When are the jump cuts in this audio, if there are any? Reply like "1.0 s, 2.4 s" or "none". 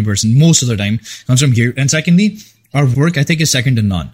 2.9 s